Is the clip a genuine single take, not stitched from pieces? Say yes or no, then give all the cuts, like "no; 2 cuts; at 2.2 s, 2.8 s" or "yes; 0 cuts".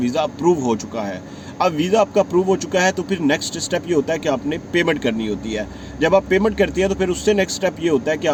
yes; 0 cuts